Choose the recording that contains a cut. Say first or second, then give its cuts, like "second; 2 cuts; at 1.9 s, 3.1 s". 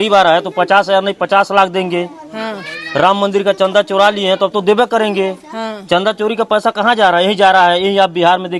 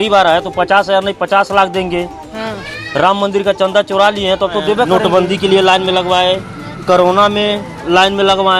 second; 1 cut; at 4.9 s